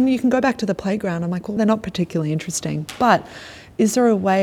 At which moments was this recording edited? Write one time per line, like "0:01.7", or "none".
0:01.6